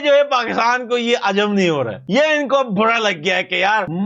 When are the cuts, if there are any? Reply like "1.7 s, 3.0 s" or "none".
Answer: none

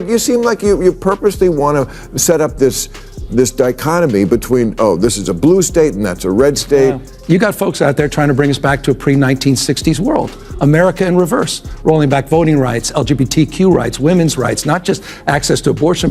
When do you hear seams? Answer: 7.1 s

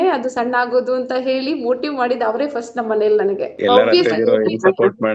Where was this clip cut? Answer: none

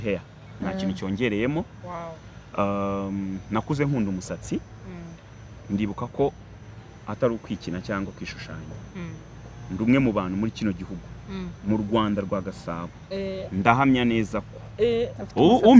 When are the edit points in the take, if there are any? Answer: none

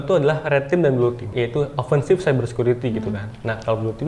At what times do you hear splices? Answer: 1.3 s

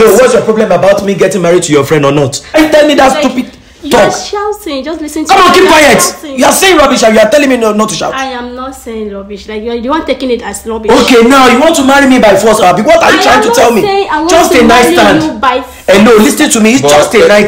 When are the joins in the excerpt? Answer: 2.6 s

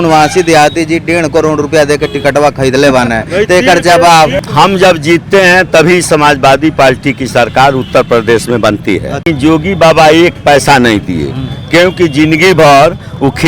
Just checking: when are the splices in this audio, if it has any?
4.4 s, 9.3 s

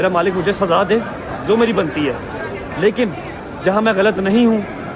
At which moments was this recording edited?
none

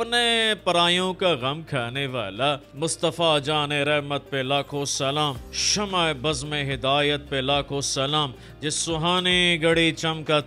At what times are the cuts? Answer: 2.7 s

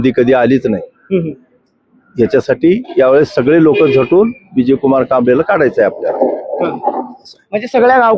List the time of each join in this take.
none

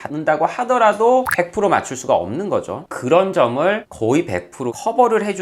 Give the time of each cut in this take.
2.9 s

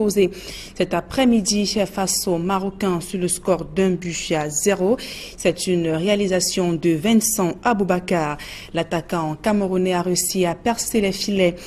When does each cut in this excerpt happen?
7.0 s

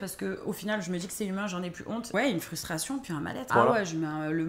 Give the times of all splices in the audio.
2.1 s, 3.5 s

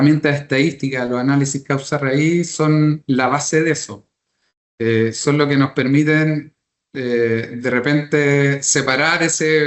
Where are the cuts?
none

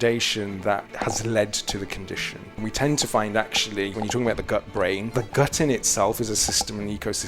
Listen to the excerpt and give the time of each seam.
0.9 s, 2.6 s, 4.0 s, 5.1 s

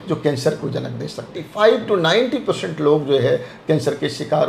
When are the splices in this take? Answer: 1.4 s

